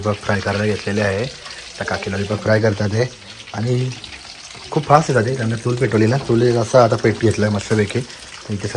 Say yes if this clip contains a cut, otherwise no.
no